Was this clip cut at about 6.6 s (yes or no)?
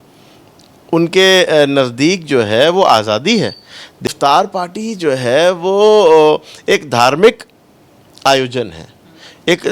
no